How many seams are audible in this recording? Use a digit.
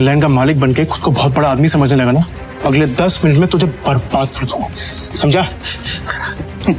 1